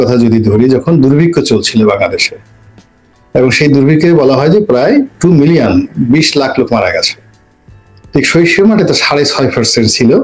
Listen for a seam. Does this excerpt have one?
no; 0 cuts

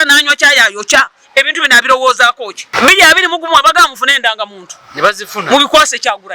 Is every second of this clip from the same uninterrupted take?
no; 1 cut; at 2.7 s

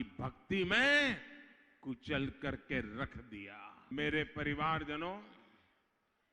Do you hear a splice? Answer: yes; 1 cut; at 3.9 s

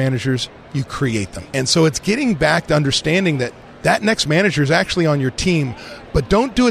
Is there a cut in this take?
yes; 1 cut; at 0.9 s

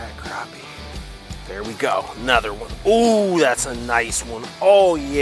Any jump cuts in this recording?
yes; 1 cut; at 1.2 s

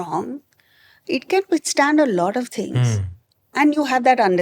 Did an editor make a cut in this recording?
yes; 1 cut; at 3.5 s

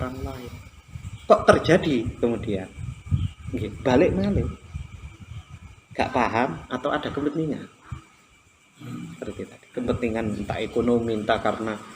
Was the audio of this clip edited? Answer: yes; 1 cut; at 1.0 s

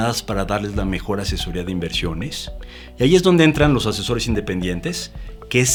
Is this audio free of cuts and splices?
yes; 0 cuts

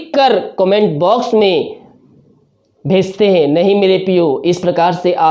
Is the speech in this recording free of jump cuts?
yes; 0 cuts

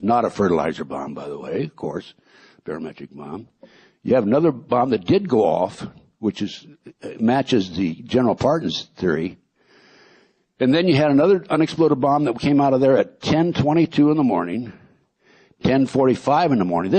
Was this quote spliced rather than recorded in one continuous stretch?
yes; 1 cut; at 12.0 s

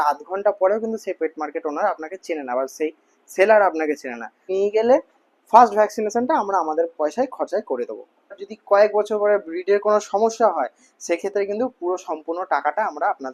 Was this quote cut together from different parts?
yes; 2 cuts; at 4.5 s, 8.5 s

